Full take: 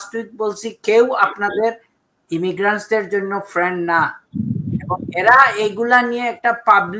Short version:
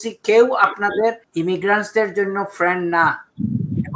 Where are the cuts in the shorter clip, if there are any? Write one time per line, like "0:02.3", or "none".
0:01.2